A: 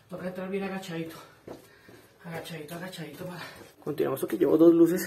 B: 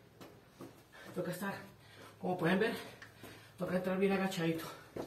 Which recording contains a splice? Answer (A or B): A